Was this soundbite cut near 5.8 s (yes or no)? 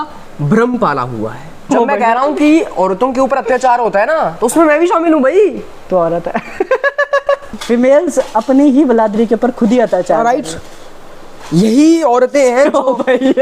no